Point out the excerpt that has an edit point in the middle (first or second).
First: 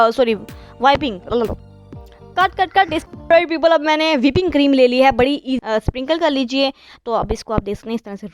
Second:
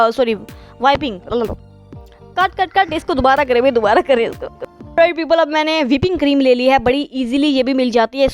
first